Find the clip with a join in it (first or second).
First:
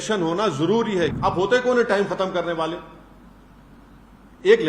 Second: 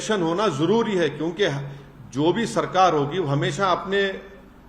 first